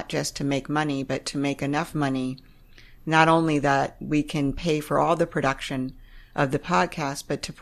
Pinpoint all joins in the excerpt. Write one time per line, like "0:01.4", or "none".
none